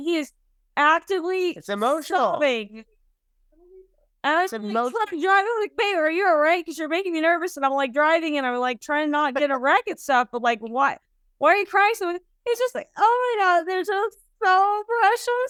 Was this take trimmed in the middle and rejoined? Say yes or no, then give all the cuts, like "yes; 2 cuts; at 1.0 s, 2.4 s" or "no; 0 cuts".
no; 0 cuts